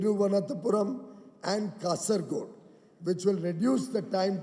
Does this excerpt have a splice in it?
no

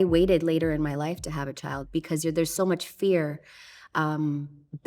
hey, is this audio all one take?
no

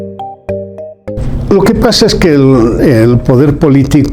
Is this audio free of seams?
no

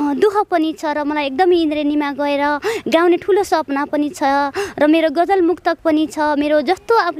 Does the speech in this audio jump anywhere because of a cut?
no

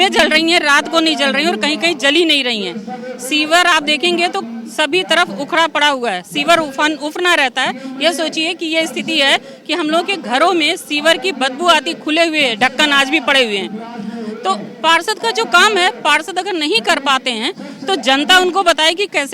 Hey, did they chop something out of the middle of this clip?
no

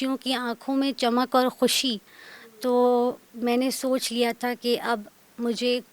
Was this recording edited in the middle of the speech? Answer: no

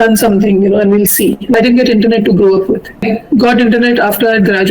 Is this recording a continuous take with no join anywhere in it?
no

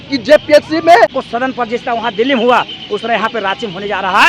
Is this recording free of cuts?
no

